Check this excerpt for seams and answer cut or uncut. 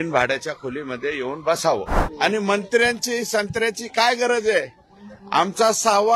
cut